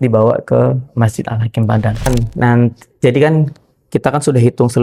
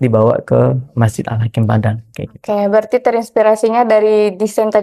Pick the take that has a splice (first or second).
first